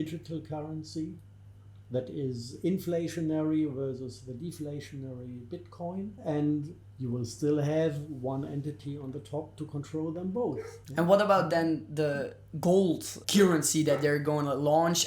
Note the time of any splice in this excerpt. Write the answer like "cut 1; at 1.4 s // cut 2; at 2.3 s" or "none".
cut 1; at 6.2 s // cut 2; at 10.8 s // cut 3; at 13.2 s

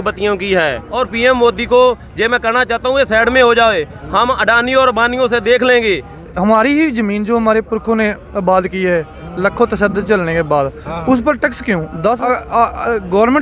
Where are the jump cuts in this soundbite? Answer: cut 1; at 0.9 s // cut 2; at 6.2 s // cut 3; at 12.2 s

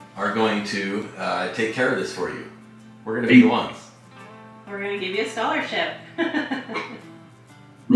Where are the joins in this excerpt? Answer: none

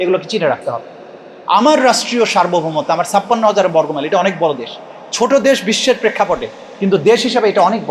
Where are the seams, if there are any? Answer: none

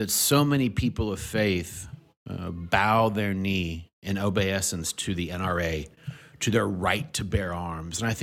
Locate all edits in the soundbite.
none

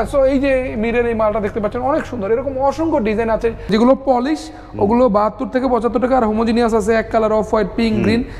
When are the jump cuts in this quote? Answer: cut 1; at 3.7 s

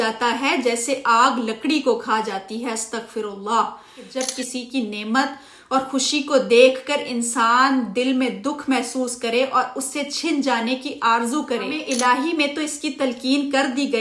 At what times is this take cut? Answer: cut 1; at 4.1 s // cut 2; at 11.8 s

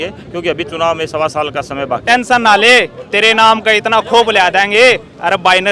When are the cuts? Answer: cut 1; at 2.0 s

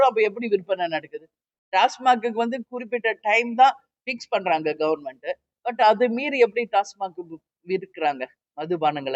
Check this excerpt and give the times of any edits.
none

